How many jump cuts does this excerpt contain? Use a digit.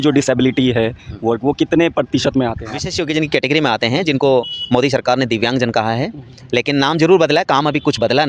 1